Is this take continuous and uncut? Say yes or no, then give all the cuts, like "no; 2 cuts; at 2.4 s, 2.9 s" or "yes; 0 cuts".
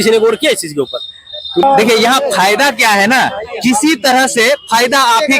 no; 1 cut; at 1.6 s